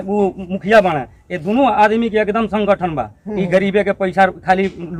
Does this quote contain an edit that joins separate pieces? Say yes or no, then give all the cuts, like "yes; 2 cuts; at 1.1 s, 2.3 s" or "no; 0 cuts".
no; 0 cuts